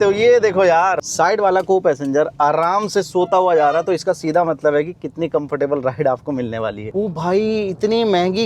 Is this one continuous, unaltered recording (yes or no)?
no